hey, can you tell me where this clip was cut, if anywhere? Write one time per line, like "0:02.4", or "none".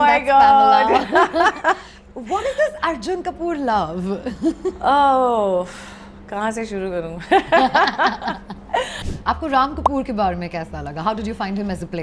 0:09.1